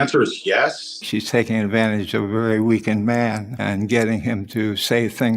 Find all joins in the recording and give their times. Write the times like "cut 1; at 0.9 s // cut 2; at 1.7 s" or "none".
cut 1; at 0.9 s